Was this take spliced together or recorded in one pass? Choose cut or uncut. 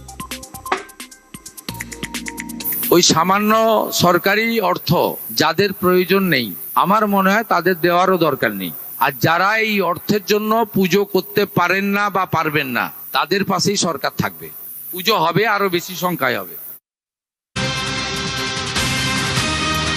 cut